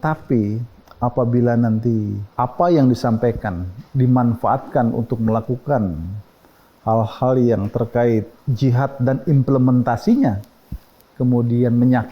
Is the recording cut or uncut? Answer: cut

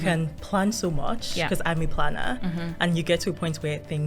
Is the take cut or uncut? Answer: uncut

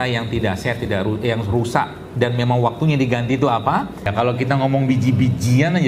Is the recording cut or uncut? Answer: cut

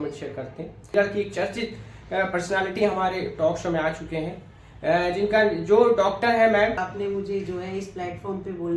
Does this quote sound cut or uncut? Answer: cut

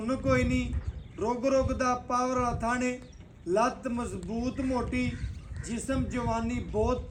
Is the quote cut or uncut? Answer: uncut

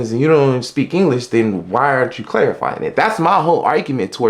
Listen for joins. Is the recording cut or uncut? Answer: uncut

